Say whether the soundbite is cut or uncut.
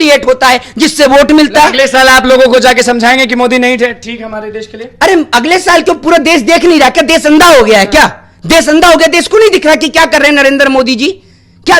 uncut